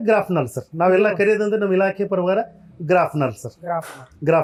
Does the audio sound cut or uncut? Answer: uncut